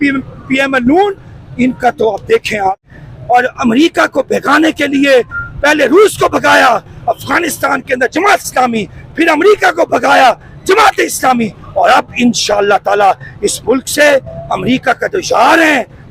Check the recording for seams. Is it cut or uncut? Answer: cut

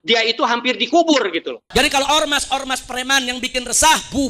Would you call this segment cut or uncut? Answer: cut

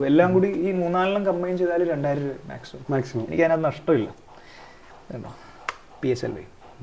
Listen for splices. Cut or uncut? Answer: uncut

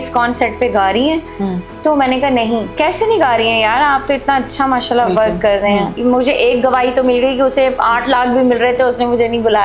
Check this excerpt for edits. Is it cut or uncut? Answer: cut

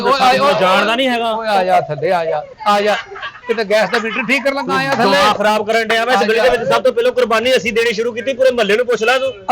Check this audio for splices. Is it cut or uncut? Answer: uncut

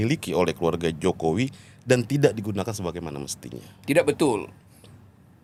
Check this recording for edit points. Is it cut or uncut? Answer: uncut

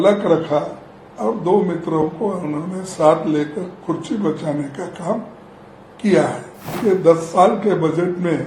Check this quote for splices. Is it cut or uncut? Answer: cut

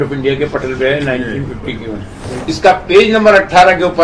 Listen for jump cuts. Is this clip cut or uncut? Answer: cut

